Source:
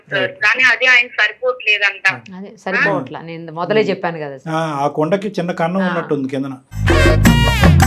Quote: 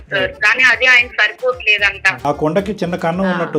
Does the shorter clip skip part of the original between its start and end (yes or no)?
yes